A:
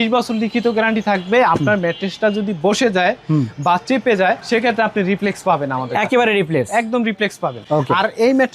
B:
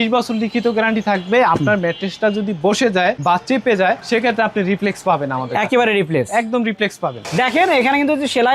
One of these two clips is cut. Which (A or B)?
B